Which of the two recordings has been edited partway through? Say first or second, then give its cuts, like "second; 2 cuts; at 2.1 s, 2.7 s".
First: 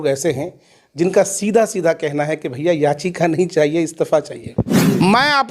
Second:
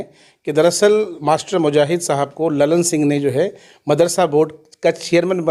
first; 1 cut; at 4.6 s